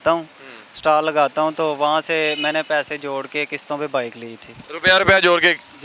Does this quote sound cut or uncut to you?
uncut